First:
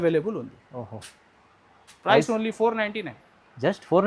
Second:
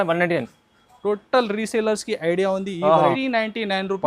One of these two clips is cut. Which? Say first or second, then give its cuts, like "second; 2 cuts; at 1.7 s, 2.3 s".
second; 1 cut; at 3.2 s